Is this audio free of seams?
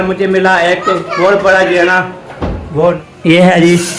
no; 1 cut; at 3.1 s

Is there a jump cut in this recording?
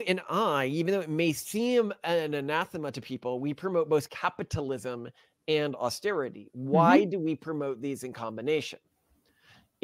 no; 0 cuts

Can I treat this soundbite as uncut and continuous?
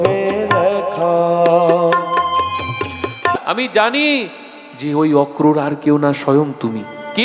no; 1 cut; at 3.4 s

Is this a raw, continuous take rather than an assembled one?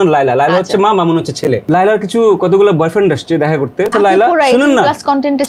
no; 2 cuts; at 1.6 s, 3.9 s

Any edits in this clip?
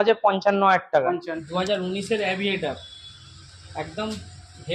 yes; 1 cut; at 1.4 s

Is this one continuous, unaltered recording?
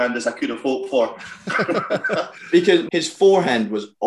no; 1 cut; at 2.9 s

